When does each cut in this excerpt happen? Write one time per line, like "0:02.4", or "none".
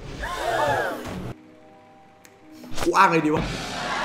0:01.3